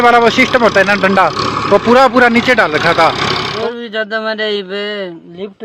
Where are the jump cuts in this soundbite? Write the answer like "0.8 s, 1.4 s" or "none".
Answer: 3.5 s